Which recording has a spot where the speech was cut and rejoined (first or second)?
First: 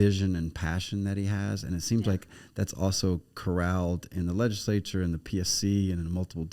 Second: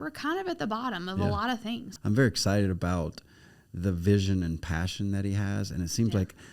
second